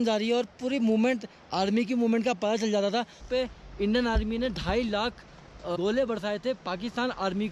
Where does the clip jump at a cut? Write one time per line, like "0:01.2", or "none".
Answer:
0:03.2
0:05.8